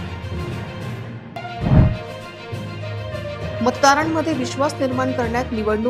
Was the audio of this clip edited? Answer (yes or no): yes